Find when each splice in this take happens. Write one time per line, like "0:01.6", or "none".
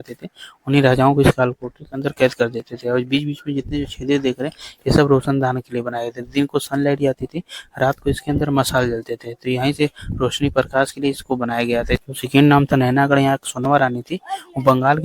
0:12.0